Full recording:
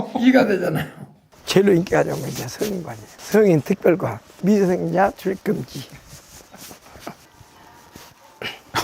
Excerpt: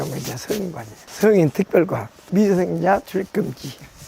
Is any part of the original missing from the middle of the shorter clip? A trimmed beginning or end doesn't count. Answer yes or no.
no